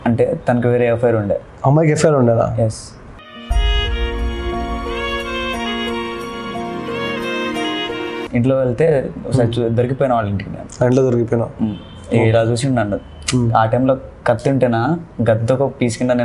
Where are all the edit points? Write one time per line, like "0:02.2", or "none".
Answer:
0:08.2